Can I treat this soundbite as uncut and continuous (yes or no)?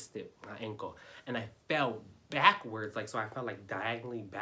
yes